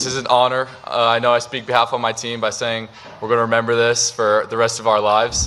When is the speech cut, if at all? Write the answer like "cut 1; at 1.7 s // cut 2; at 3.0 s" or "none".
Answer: none